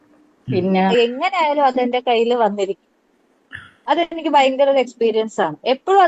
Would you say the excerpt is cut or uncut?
cut